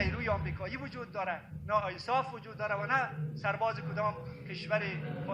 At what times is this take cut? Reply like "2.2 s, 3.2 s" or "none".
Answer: none